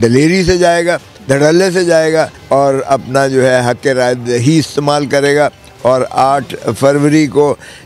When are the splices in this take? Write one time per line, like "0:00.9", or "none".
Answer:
0:01.1
0:02.4